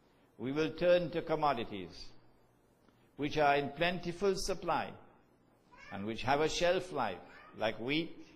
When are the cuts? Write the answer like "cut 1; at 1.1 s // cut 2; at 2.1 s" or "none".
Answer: cut 1; at 2.6 s